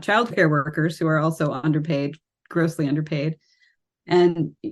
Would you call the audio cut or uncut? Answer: uncut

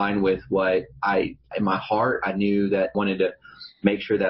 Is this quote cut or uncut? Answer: cut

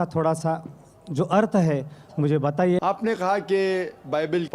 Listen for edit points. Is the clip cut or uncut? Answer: cut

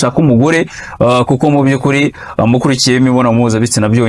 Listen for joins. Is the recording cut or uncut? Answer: uncut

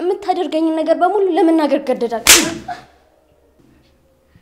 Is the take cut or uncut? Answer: uncut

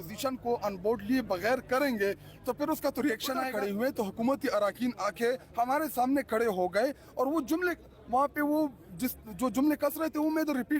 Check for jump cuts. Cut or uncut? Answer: cut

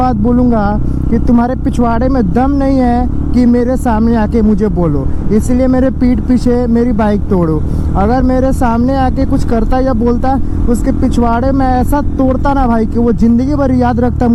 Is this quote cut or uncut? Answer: uncut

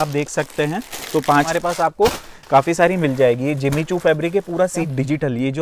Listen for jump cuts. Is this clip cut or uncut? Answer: cut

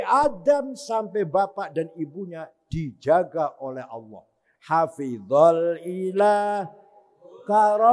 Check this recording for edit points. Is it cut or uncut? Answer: uncut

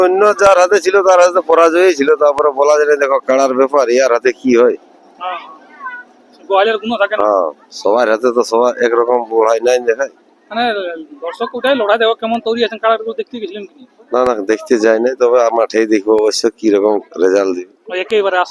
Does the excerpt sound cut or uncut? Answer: uncut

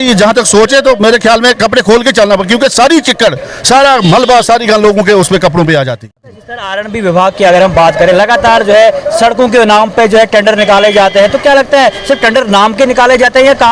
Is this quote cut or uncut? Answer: cut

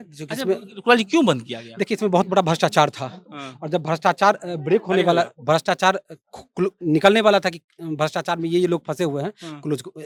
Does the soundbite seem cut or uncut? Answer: uncut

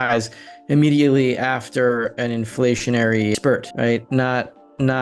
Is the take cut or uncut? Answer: cut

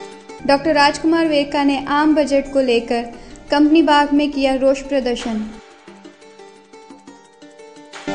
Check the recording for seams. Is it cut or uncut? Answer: uncut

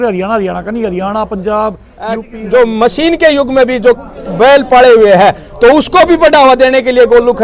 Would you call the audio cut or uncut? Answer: cut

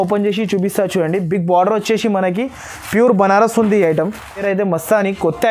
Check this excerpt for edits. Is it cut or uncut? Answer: cut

